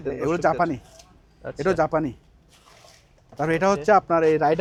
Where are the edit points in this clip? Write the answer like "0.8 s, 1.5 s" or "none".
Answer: none